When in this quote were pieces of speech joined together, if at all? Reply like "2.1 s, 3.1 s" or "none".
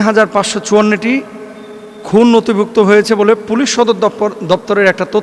none